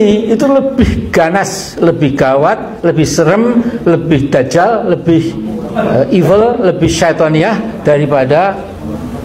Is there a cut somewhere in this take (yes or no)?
no